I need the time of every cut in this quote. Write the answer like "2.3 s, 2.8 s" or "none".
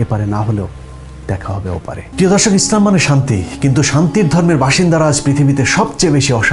2.1 s